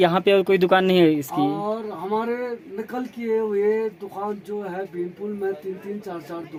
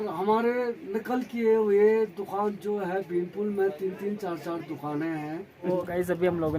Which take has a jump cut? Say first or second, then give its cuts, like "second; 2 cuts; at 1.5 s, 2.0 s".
second; 1 cut; at 5.7 s